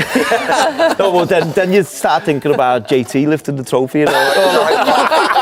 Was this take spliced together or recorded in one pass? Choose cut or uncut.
uncut